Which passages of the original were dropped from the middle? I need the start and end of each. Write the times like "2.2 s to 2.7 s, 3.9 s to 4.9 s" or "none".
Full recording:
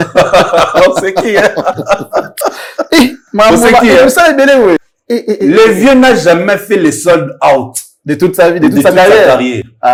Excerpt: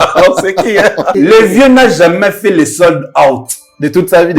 1.7 s to 5.4 s